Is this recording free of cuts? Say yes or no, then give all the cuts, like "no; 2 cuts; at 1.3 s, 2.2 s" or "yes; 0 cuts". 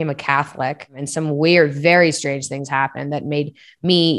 no; 1 cut; at 1.0 s